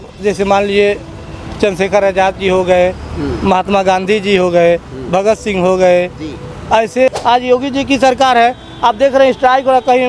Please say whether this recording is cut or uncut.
cut